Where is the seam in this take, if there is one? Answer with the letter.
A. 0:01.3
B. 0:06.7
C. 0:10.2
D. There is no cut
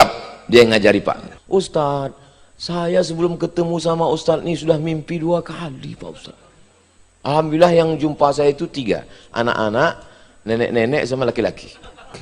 A